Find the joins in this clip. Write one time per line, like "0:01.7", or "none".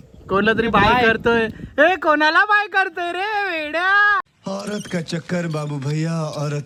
none